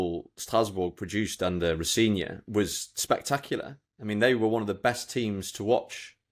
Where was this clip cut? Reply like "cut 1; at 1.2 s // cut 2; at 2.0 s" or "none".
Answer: none